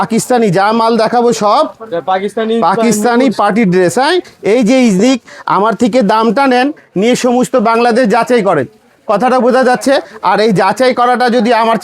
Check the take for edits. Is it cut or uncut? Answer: cut